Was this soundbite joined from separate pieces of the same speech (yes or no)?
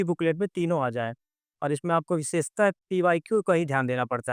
no